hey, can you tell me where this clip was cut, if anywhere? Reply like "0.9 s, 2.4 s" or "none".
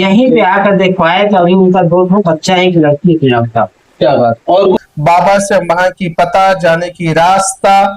4.8 s